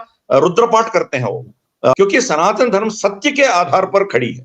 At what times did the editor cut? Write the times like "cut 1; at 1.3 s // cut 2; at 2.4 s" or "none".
cut 1; at 1.9 s